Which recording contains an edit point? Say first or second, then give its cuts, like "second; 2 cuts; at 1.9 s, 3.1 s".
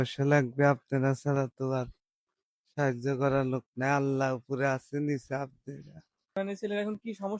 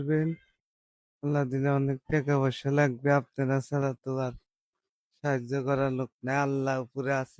first; 1 cut; at 6.4 s